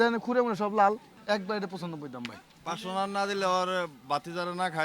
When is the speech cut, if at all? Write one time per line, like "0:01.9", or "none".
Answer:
0:01.1
0:02.5